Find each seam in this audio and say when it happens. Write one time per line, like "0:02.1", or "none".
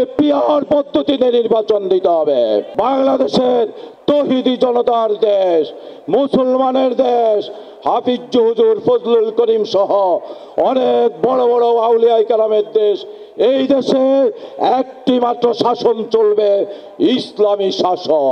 0:02.7
0:16.8